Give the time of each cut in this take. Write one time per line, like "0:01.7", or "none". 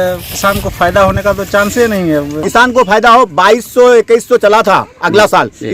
0:02.4